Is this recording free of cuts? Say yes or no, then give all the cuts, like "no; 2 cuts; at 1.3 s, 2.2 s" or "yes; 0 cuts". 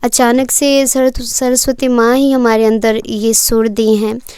yes; 0 cuts